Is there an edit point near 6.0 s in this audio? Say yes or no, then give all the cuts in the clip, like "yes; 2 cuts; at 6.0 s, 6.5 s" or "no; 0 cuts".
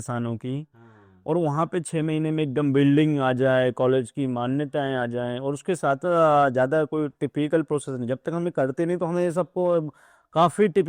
yes; 1 cut; at 6.0 s